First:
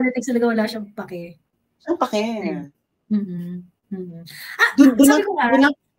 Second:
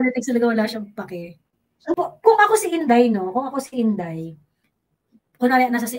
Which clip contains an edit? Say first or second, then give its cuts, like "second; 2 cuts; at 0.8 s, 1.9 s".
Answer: second; 1 cut; at 2.0 s